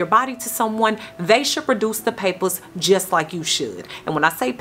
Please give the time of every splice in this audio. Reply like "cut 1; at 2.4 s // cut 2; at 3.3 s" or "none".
none